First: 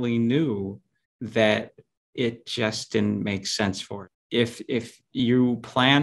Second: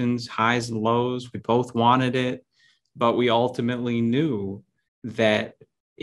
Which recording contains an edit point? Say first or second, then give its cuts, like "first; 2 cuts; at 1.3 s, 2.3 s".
first; 1 cut; at 3.9 s